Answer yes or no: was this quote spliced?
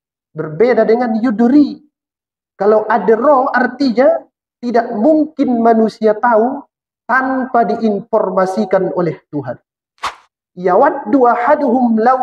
yes